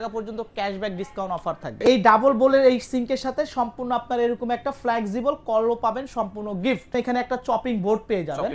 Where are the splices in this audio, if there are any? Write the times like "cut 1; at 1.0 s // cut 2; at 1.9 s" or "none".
cut 1; at 1.8 s // cut 2; at 6.9 s